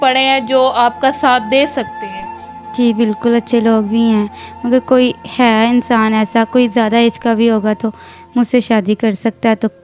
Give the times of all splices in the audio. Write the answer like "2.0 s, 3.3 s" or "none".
none